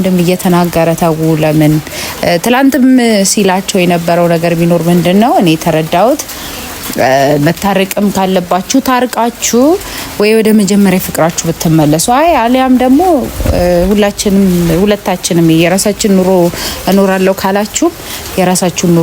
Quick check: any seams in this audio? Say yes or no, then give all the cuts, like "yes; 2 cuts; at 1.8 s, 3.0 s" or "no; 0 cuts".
no; 0 cuts